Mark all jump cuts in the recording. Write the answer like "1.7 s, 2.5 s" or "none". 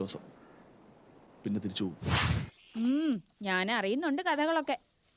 2.1 s